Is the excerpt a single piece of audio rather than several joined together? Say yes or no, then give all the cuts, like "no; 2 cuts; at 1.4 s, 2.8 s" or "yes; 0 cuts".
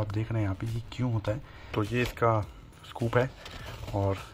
yes; 0 cuts